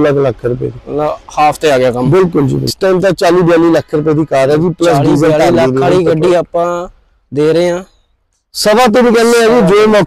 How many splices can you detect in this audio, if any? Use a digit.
1